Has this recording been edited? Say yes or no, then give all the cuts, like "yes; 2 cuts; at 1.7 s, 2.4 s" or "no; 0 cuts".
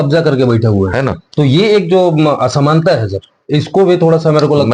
no; 0 cuts